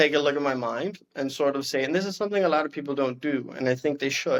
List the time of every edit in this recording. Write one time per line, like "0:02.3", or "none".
none